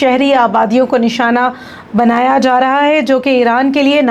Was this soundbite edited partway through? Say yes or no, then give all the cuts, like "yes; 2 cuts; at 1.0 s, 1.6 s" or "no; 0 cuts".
no; 0 cuts